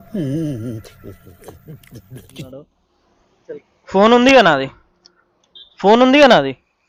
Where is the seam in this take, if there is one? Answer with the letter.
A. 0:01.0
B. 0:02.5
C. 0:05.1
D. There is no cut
D